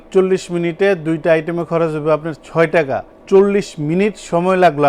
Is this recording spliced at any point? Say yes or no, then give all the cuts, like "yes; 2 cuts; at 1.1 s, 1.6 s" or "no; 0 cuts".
no; 0 cuts